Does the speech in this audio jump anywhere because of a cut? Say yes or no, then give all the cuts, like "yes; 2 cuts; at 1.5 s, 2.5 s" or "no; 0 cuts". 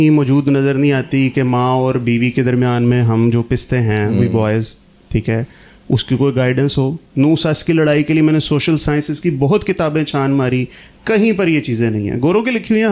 no; 0 cuts